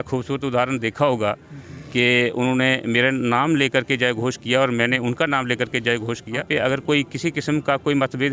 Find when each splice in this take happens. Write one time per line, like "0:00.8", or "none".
0:06.5